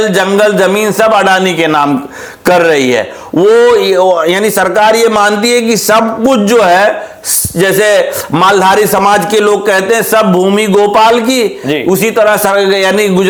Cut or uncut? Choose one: uncut